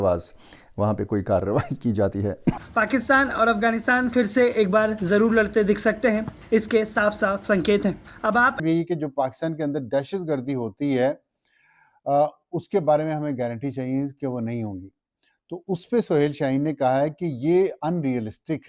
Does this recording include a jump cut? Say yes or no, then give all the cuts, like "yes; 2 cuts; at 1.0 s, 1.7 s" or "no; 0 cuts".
yes; 2 cuts; at 2.6 s, 8.6 s